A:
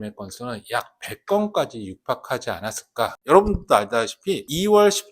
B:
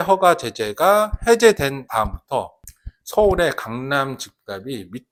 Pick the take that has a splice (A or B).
A